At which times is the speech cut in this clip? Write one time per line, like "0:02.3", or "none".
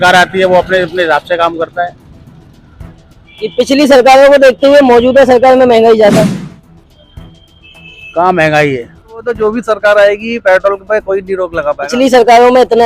0:09.3